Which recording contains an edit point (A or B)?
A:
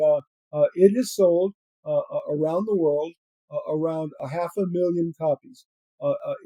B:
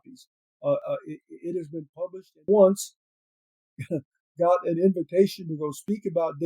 B